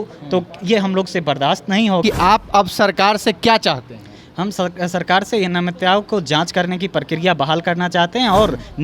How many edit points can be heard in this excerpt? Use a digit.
1